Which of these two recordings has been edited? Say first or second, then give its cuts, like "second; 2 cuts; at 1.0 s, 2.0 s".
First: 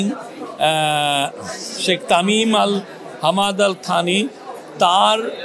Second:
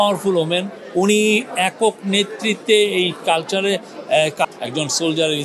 second; 1 cut; at 4.5 s